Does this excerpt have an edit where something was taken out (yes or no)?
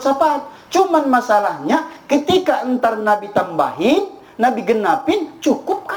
no